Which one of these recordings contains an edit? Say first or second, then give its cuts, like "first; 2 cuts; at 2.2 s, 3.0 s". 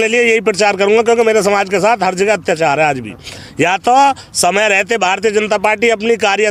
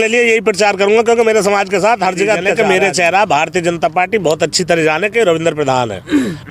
second; 1 cut; at 2.5 s